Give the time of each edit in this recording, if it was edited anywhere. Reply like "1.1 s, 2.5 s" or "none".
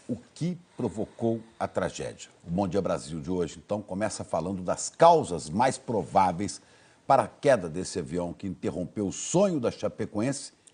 none